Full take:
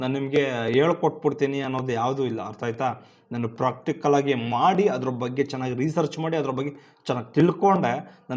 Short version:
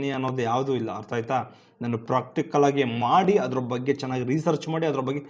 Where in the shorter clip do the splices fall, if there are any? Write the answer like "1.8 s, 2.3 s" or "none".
none